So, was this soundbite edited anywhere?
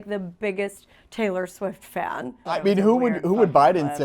yes; 1 cut; at 2.5 s

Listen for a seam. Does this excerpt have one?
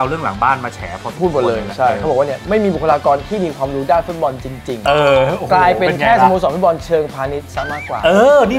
no; 0 cuts

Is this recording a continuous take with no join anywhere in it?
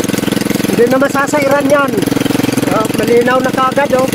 no; 1 cut; at 2.6 s

